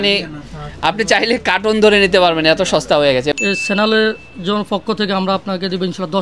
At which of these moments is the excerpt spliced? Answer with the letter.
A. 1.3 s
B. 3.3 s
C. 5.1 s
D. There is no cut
B